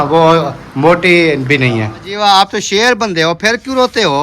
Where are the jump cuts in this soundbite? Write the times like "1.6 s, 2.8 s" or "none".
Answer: 2.0 s